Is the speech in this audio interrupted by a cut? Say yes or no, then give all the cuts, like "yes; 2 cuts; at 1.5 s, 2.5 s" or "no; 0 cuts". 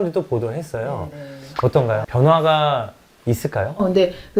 no; 0 cuts